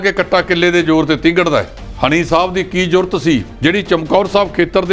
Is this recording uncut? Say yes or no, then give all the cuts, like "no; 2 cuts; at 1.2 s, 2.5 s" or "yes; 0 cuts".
no; 2 cuts; at 1.8 s, 3.5 s